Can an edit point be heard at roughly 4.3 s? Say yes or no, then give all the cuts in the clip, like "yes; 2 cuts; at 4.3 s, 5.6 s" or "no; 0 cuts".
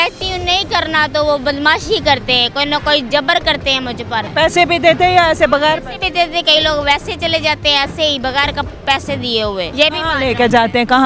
yes; 2 cuts; at 4.3 s, 9.7 s